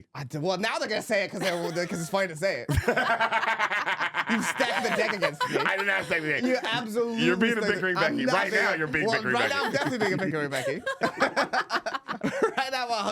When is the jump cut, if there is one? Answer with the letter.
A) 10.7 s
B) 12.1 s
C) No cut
B